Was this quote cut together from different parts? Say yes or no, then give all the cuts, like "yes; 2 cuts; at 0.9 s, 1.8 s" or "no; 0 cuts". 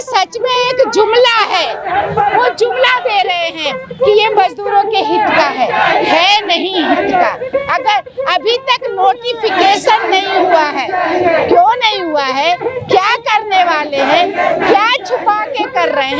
no; 0 cuts